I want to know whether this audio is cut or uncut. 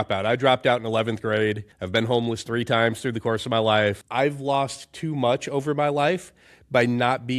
cut